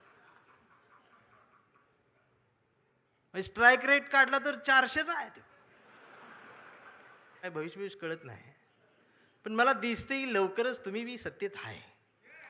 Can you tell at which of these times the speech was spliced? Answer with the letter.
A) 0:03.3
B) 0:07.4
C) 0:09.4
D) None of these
B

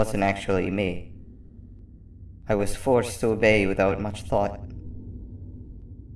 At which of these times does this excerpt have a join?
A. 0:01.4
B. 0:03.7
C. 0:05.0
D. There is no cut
D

